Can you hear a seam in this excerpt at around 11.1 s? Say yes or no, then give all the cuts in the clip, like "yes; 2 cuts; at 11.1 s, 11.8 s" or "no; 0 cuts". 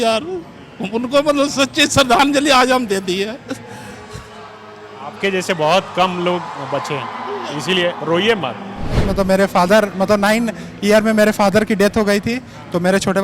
no; 1 cut; at 9.1 s